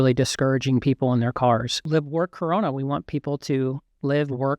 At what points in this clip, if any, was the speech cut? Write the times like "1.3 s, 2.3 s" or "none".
1.8 s